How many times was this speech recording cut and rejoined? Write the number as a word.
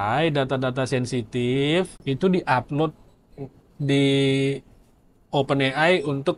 one